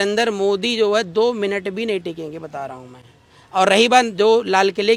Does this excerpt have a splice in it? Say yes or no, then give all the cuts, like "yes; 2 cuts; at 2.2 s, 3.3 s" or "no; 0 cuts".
no; 0 cuts